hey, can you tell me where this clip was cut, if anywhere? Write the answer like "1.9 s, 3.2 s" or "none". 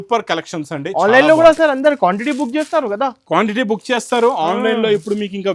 none